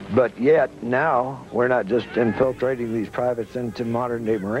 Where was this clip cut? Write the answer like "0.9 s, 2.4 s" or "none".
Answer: 2.9 s